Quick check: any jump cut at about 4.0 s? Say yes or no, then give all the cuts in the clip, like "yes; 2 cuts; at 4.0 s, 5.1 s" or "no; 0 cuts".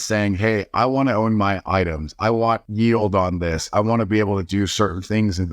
no; 1 cut; at 2.7 s